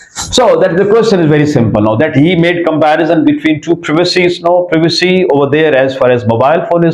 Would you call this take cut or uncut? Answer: uncut